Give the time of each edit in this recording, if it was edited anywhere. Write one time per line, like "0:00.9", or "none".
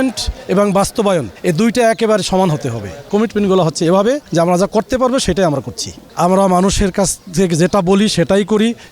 0:01.3
0:03.1
0:04.2
0:06.0